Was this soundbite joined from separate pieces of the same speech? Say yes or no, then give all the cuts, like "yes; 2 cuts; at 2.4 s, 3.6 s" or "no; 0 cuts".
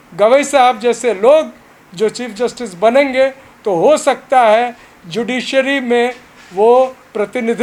no; 0 cuts